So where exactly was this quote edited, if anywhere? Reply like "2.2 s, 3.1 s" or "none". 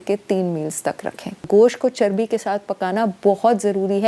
1.4 s